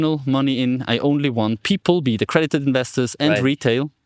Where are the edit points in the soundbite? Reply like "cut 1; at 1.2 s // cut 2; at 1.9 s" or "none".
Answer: cut 1; at 1.6 s